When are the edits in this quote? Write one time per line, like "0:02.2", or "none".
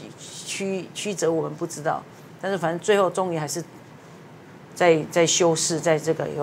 none